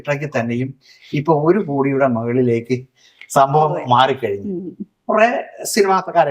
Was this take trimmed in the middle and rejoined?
no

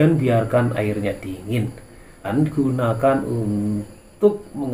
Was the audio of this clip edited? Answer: yes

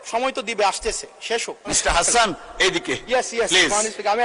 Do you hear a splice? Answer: yes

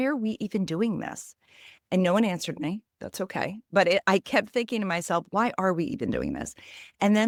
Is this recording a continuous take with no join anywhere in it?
yes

